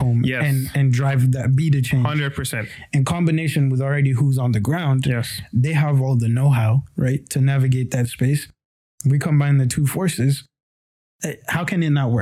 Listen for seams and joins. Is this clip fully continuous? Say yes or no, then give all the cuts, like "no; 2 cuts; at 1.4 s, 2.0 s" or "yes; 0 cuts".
yes; 0 cuts